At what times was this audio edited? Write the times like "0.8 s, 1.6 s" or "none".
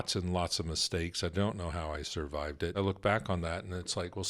2.7 s